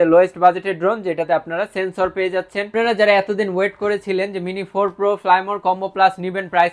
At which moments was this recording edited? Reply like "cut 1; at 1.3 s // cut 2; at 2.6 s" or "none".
cut 1; at 2.7 s